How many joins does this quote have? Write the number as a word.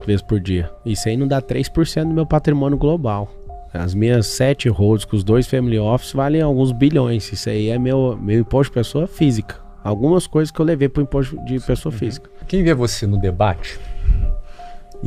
one